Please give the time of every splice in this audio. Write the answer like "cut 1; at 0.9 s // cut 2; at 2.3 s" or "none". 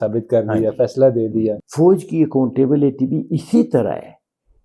cut 1; at 1.6 s